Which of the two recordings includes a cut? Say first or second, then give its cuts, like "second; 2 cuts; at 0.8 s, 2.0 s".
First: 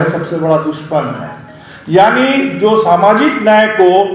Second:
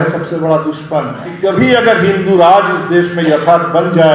second; 1 cut; at 1.2 s